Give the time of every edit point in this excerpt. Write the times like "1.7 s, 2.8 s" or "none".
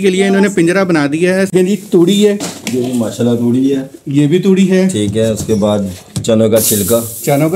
1.5 s